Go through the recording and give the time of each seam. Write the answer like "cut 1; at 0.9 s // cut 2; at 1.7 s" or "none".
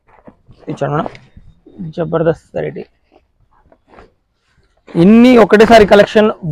none